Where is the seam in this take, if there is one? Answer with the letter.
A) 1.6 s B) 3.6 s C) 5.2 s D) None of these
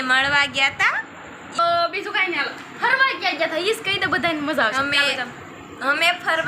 A